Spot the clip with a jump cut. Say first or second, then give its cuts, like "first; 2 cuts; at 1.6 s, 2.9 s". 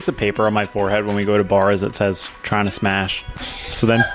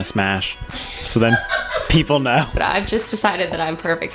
second; 1 cut; at 2.6 s